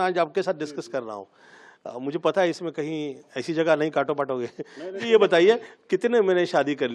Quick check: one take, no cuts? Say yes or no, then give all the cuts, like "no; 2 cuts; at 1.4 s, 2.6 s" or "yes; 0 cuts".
no; 1 cut; at 5.0 s